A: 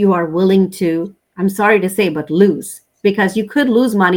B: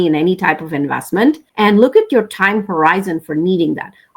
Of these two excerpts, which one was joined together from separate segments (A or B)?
B